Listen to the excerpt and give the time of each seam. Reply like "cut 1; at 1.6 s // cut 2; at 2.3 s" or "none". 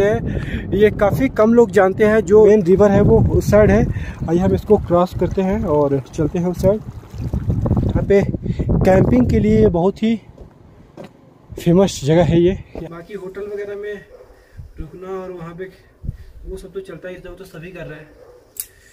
cut 1; at 2.5 s // cut 2; at 8.0 s // cut 3; at 12.7 s